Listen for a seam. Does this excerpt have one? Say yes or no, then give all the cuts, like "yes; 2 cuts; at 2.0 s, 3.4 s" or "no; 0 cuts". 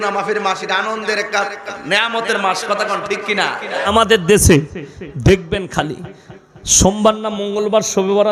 yes; 1 cut; at 3.8 s